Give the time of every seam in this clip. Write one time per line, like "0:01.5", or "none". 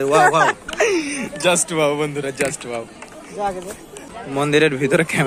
0:04.2